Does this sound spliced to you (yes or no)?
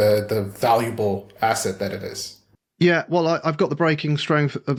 no